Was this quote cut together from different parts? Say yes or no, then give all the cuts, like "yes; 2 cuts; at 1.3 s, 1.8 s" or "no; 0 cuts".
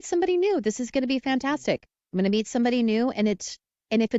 no; 0 cuts